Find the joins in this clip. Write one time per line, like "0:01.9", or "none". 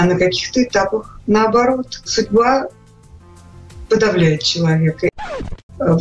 0:02.1
0:05.1